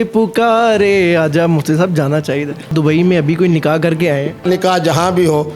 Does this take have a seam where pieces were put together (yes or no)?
yes